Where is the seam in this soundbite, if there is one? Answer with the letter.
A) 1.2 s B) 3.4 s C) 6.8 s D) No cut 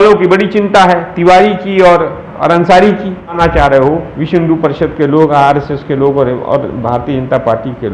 B